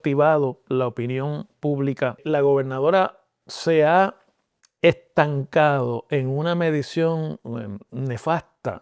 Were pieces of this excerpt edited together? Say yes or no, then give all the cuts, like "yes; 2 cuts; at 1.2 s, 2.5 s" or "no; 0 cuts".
yes; 1 cut; at 2.2 s